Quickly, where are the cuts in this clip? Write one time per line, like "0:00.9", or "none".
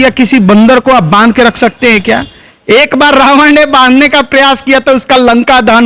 none

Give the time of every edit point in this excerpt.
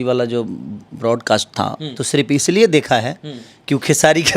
0:02.0

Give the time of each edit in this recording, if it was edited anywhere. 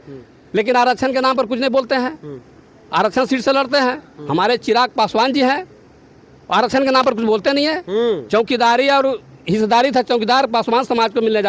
none

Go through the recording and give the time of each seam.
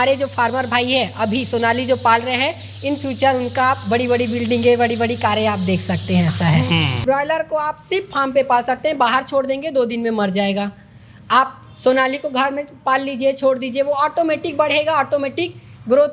0:07.0

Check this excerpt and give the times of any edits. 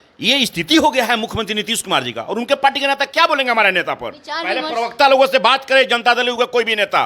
none

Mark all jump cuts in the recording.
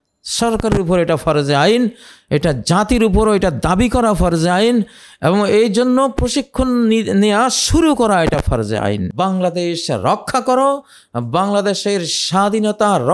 0:09.1

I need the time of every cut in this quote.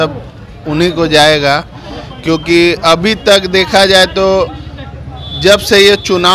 none

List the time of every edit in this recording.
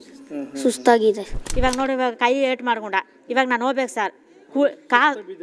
0:01.4

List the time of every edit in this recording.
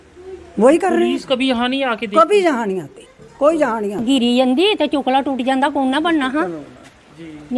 0:04.0

